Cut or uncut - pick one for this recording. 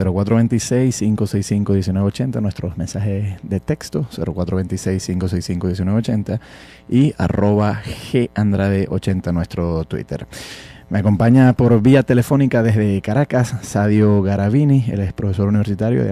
uncut